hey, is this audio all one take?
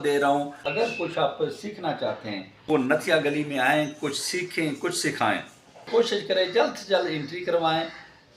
no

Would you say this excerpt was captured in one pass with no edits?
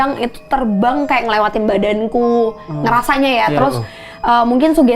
yes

